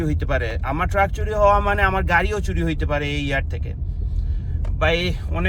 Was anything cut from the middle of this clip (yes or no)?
no